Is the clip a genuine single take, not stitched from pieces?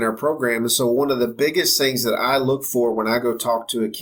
yes; 0 cuts

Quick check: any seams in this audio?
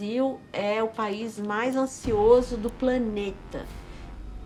no; 0 cuts

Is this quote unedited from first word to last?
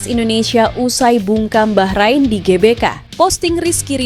no; 1 cut; at 3.0 s

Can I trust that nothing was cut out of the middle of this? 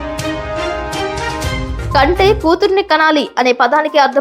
no; 1 cut; at 1.7 s

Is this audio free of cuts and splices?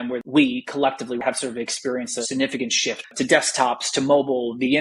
no; 3 cuts; at 1.2 s, 2.3 s, 3.1 s

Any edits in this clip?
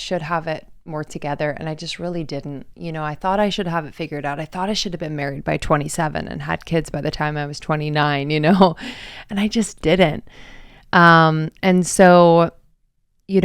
no; 0 cuts

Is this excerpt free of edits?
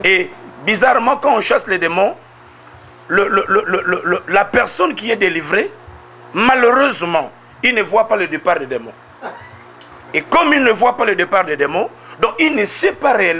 yes; 0 cuts

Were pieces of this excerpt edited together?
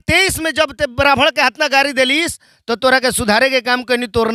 no; 0 cuts

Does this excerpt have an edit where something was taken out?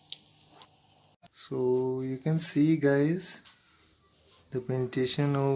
yes; 1 cut; at 1.3 s

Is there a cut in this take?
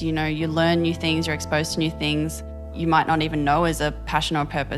yes; 1 cut; at 2.7 s

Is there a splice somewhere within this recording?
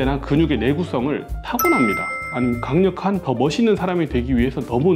yes; 1 cut; at 2.2 s

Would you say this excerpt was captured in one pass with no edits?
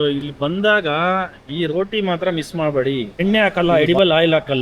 no; 1 cut; at 3.1 s

